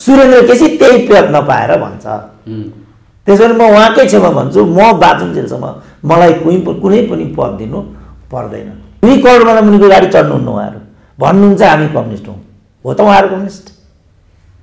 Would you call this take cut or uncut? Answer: cut